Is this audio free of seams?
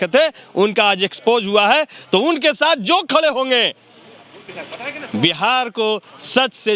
yes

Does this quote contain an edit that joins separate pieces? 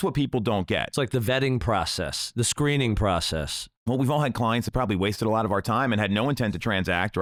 no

